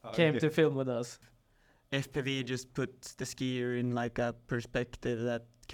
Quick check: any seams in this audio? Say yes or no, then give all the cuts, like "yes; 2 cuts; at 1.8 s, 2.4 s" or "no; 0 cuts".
yes; 1 cut; at 1.3 s